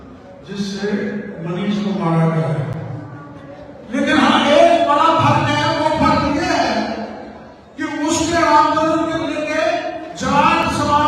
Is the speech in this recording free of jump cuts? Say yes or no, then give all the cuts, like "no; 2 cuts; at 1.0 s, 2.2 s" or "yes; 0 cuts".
yes; 0 cuts